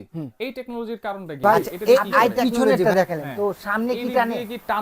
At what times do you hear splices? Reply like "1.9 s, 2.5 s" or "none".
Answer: 2.4 s